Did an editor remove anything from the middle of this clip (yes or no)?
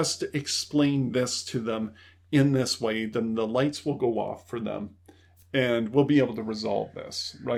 no